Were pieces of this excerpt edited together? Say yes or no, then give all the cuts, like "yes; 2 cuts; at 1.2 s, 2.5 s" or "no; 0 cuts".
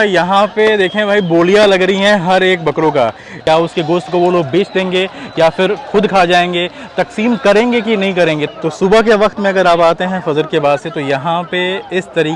yes; 2 cuts; at 3.3 s, 8.5 s